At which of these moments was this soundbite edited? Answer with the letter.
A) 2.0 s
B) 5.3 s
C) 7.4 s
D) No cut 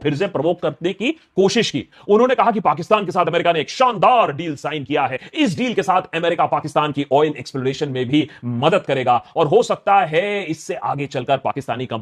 D